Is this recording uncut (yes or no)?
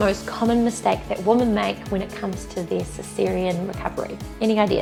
yes